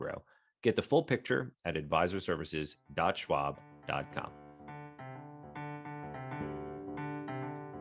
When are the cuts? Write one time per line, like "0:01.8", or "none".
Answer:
0:04.4